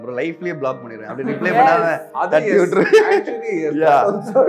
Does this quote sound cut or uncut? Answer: uncut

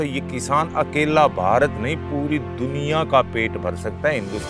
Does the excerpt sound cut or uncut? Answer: uncut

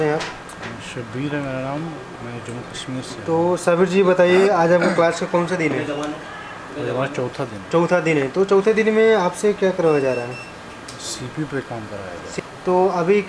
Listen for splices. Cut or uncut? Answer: cut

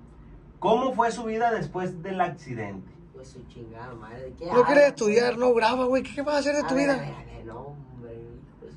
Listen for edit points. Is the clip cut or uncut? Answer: cut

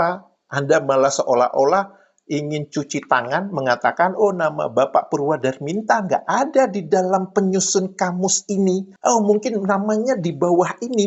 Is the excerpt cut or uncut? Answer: uncut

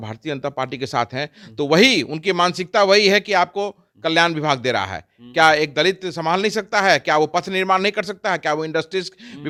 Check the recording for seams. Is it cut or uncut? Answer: uncut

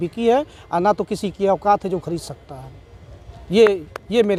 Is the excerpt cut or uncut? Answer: uncut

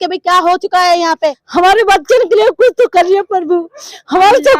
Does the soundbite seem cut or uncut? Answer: cut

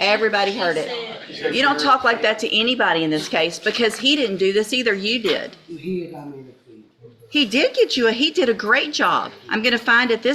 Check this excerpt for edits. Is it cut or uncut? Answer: cut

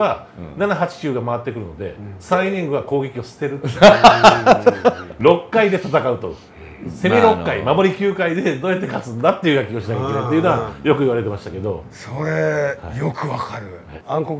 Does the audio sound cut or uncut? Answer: uncut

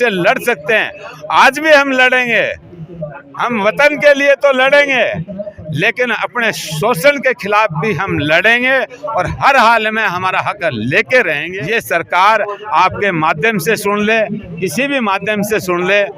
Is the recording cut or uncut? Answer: cut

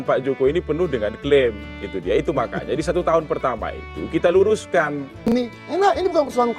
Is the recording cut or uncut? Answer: cut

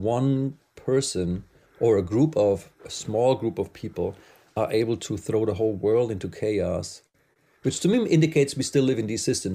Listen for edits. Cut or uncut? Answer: uncut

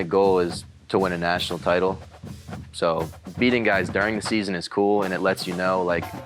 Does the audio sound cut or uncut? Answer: uncut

